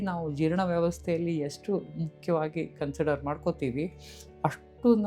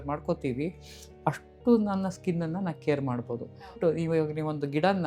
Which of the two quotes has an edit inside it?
second; 1 cut; at 3.8 s

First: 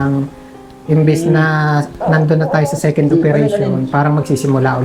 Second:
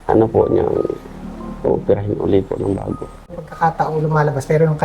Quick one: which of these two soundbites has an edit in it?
second; 1 cut; at 3.3 s

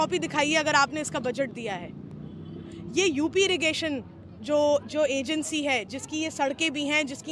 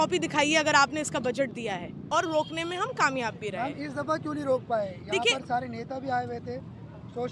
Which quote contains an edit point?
second; 1 cut; at 2.0 s

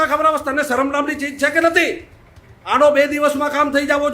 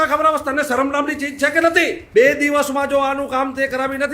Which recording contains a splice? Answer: second; 1 cut; at 2.0 s

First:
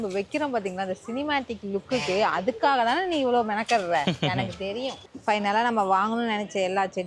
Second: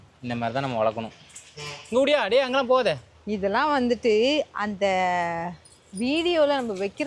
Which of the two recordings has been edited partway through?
first; 1 cut; at 5.0 s

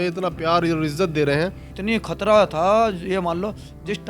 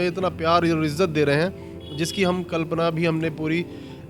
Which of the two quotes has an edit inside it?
first; 1 cut; at 1.8 s

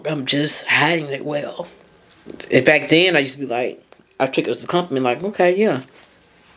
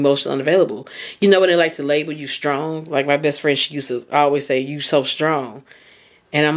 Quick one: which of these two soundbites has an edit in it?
first; 1 cut; at 2.3 s

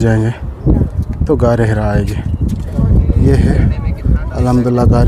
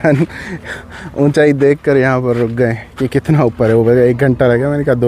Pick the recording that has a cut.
first; 1 cut; at 2.7 s

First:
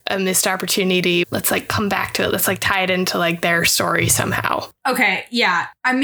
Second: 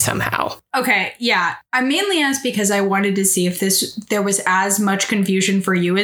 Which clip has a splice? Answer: first; 1 cut; at 1.2 s

